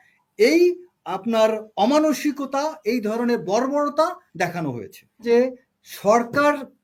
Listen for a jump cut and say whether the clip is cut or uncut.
uncut